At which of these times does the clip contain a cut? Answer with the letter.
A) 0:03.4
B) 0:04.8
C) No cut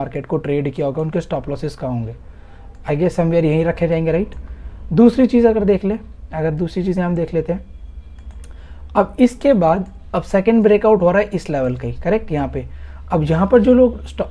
C